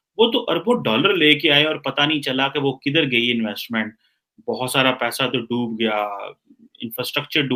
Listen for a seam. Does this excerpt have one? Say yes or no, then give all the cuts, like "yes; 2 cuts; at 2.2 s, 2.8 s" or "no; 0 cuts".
no; 0 cuts